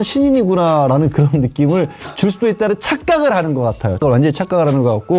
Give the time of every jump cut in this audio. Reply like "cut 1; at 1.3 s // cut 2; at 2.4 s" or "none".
cut 1; at 4.0 s